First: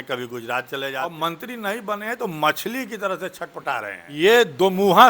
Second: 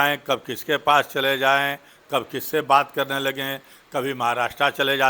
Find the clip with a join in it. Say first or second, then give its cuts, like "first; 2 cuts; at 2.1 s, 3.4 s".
first; 2 cuts; at 1.0 s, 4.0 s